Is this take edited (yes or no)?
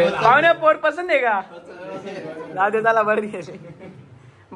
no